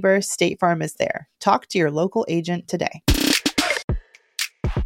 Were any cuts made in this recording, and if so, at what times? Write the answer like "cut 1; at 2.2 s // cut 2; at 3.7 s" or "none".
cut 1; at 3.8 s

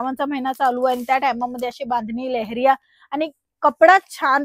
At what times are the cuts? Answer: none

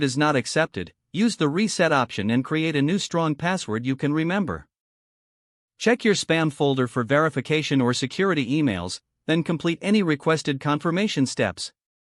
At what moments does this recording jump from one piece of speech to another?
none

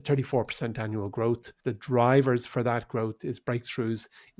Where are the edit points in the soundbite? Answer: cut 1; at 1.5 s

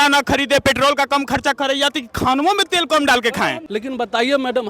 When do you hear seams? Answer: cut 1; at 3.6 s

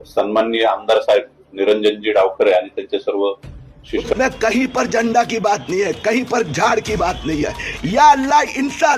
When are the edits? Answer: cut 1; at 4.1 s

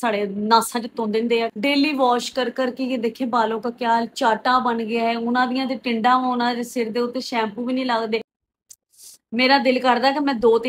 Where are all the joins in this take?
cut 1; at 1.5 s // cut 2; at 8.4 s

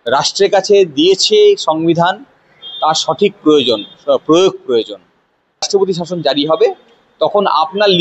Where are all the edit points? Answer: cut 1; at 5.7 s

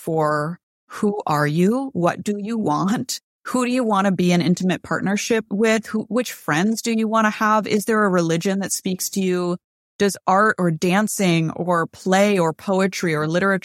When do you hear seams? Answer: cut 1; at 5.5 s

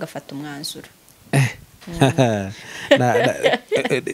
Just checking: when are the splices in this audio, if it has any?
none

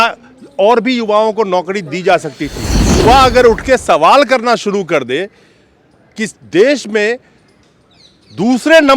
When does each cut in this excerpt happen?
cut 1; at 2.9 s

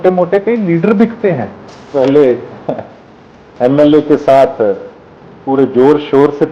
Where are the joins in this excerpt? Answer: cut 1; at 1.9 s

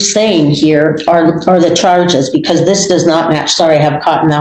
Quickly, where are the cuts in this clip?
none

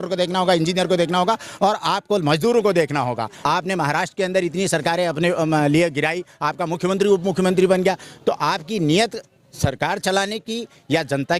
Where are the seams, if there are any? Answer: cut 1; at 3.4 s

